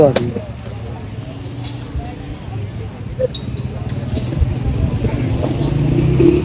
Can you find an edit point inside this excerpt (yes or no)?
no